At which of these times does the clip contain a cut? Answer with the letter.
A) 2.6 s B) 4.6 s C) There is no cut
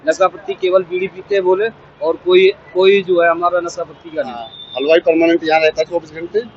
B